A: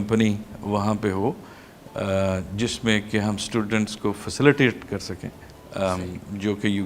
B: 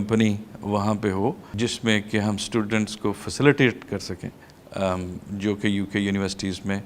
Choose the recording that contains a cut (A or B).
B